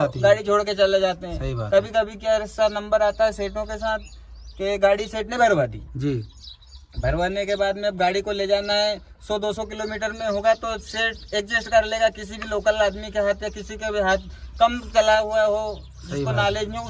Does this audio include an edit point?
no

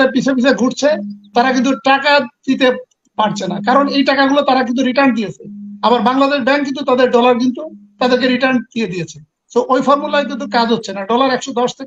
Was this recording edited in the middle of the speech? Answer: no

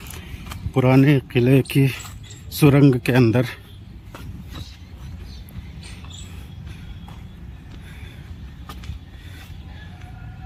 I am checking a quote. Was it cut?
no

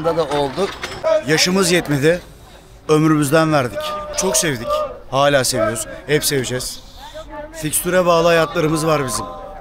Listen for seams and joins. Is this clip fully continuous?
no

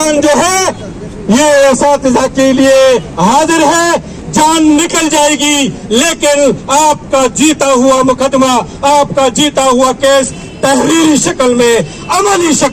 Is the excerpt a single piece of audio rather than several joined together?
yes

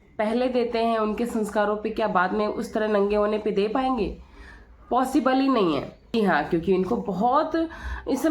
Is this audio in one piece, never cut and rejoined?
no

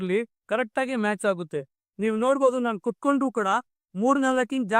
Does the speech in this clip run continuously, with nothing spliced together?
no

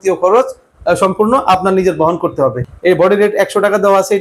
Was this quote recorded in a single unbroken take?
no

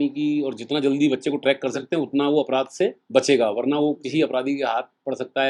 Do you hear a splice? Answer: no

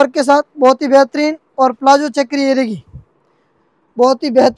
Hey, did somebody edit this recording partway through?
no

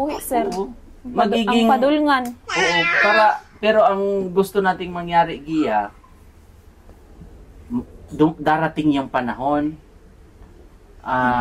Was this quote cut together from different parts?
no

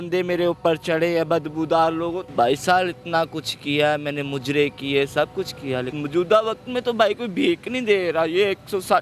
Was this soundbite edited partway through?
yes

